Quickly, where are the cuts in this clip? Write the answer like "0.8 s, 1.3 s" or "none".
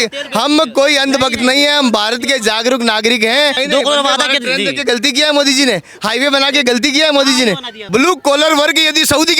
3.6 s, 7.7 s